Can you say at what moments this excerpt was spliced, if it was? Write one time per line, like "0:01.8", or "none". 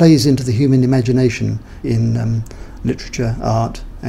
0:01.8